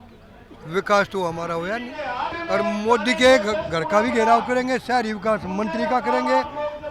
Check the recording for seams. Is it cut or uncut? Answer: cut